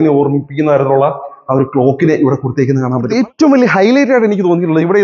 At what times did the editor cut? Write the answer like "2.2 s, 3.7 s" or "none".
3.1 s